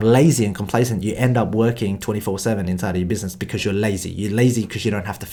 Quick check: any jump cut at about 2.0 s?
no; 0 cuts

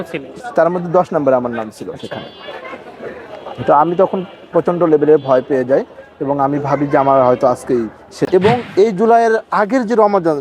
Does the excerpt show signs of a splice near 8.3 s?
yes; 1 cut; at 8.3 s

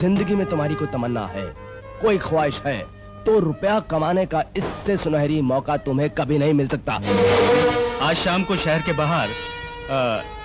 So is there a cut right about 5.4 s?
no; 1 cut; at 7.9 s

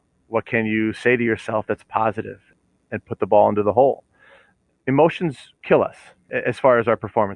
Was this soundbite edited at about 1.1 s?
no; 4 cuts; at 2.5 s, 4.4 s, 5.5 s, 6.3 s

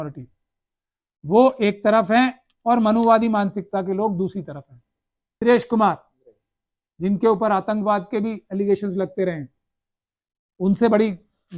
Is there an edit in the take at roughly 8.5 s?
no; 1 cut; at 5.4 s

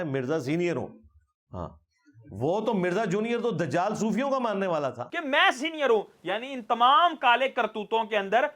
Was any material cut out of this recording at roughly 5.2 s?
yes; 1 cut; at 5.2 s

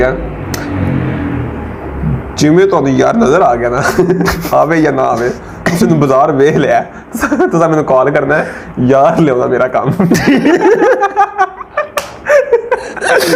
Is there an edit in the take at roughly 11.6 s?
no; 0 cuts

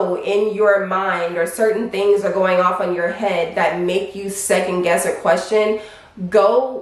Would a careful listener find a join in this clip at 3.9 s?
no; 0 cuts

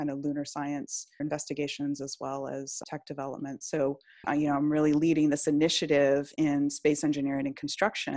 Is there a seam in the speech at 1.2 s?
yes; 3 cuts; at 1.2 s, 2.8 s, 4.2 s

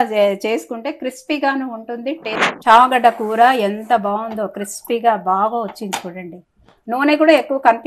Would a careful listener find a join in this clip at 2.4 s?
yes; 1 cut; at 2.4 s

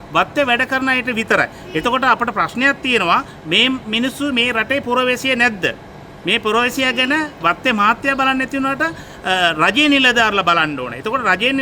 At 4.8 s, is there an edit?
no; 0 cuts

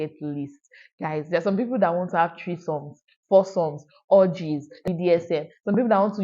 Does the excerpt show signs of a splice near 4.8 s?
yes; 1 cut; at 4.8 s

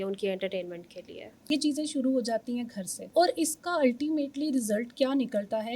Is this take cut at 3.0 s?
yes; 2 cuts; at 1.4 s, 3.0 s

